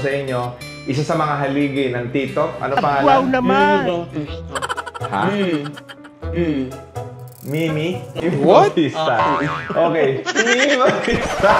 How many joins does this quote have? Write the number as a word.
one